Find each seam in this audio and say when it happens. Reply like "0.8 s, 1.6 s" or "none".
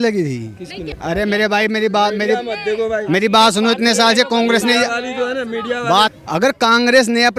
0.9 s, 6.1 s